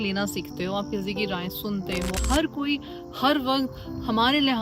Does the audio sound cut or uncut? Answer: cut